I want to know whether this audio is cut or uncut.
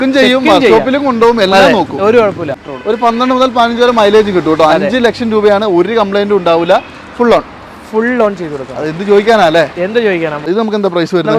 cut